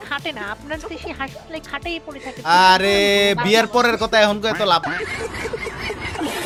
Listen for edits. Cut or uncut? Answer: uncut